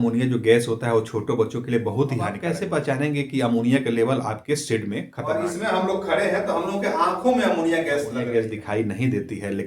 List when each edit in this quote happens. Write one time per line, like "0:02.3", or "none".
0:02.4
0:05.2
0:08.2